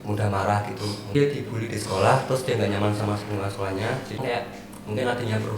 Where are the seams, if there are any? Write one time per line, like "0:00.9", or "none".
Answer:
0:01.2
0:04.2